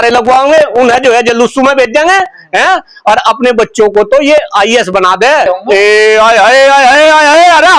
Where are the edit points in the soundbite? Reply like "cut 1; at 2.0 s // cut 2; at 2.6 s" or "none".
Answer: cut 1; at 5.5 s